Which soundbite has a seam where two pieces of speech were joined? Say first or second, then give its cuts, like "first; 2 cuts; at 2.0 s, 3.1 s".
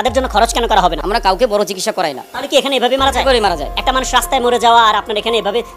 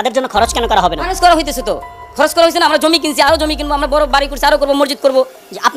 first; 2 cuts; at 1.0 s, 3.7 s